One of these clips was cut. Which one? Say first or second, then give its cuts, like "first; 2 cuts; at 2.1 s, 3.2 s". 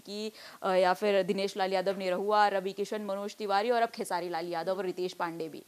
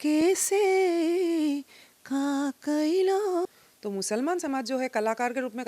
second; 1 cut; at 3.4 s